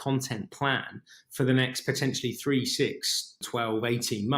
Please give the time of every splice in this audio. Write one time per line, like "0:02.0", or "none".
0:03.4